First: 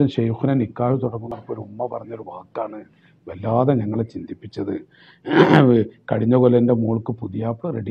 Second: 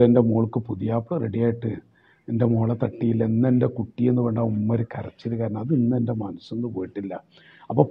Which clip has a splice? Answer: first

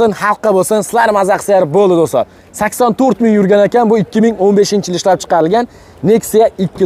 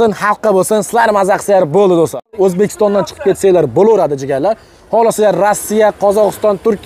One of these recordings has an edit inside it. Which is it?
second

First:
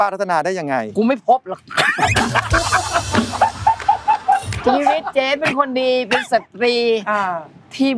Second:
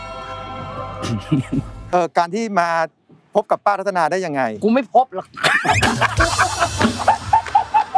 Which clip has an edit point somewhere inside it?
second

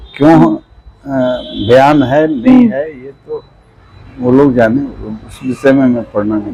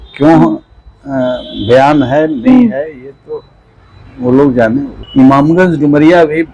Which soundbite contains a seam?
second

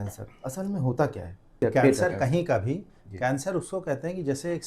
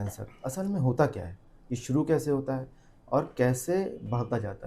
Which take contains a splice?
first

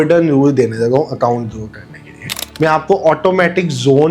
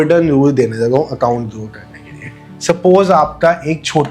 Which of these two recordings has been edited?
first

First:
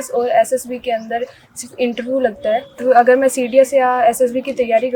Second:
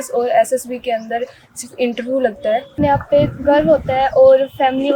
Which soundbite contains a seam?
second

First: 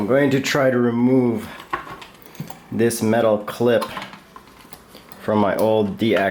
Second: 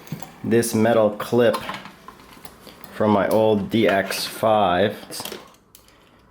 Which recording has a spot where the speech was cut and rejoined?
second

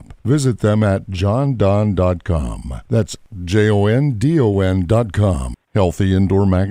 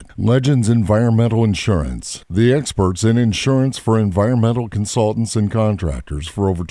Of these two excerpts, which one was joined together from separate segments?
first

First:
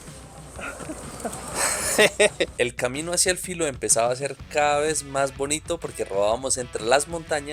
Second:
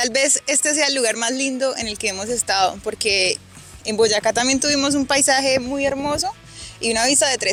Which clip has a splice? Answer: first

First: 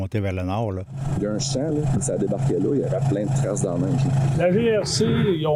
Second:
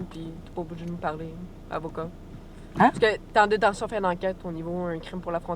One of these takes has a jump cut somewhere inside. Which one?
first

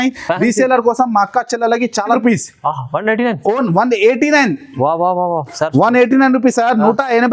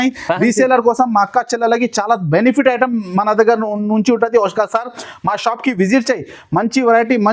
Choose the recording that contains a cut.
first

